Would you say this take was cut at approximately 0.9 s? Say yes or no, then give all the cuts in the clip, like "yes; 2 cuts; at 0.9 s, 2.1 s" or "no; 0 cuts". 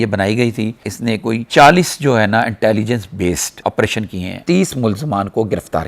yes; 2 cuts; at 0.9 s, 4.5 s